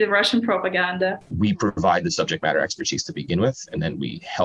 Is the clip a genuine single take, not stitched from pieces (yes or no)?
no